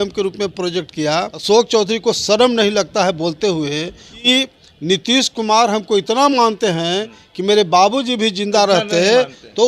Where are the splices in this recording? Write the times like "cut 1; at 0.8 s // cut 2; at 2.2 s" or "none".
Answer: cut 1; at 1.3 s // cut 2; at 4.2 s